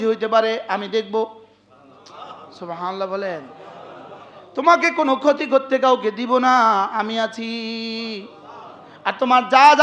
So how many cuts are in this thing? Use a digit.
0